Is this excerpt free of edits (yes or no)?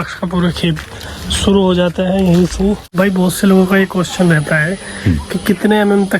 no